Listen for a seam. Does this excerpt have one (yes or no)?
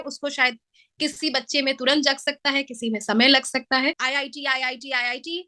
yes